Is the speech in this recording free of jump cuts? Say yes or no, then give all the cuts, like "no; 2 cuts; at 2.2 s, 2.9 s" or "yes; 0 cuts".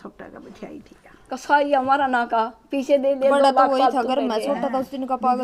yes; 0 cuts